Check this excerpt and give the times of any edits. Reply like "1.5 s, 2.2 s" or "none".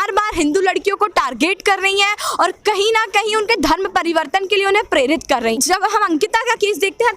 5.6 s